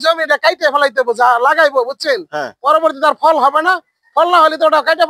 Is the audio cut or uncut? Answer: uncut